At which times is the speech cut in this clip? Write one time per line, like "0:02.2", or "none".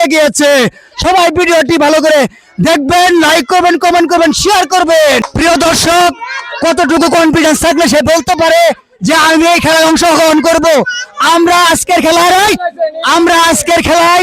0:05.3